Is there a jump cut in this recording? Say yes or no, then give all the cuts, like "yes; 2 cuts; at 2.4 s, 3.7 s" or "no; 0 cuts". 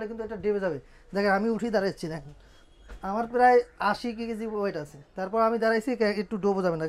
no; 0 cuts